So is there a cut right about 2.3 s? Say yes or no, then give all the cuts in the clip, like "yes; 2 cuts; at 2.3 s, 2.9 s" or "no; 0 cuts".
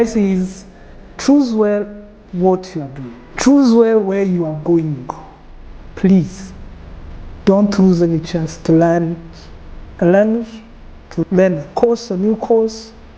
no; 3 cuts; at 5.8 s, 8.6 s, 11.2 s